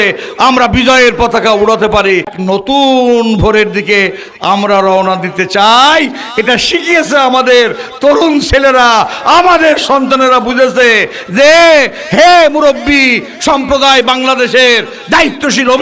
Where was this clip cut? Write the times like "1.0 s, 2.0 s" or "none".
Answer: 2.4 s